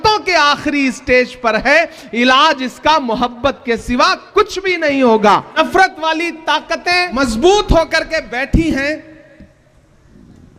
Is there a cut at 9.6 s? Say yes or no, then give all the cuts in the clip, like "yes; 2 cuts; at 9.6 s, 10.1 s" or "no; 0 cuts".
no; 2 cuts; at 5.6 s, 7.1 s